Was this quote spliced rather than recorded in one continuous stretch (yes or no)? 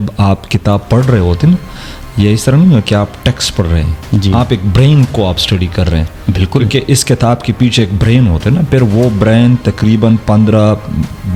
no